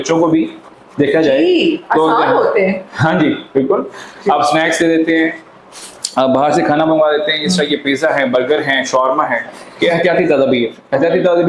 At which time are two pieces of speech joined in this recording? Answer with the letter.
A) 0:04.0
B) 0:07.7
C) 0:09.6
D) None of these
C